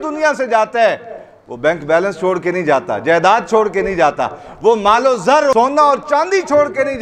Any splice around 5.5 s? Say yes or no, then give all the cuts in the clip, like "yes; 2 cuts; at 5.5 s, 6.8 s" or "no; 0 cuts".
yes; 1 cut; at 5.5 s